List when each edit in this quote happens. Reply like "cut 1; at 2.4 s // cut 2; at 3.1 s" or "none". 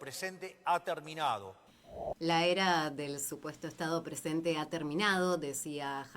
cut 1; at 2.1 s